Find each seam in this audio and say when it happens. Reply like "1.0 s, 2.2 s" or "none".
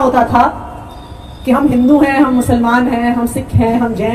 none